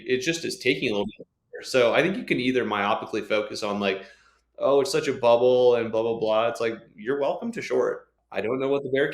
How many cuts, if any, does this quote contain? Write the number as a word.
one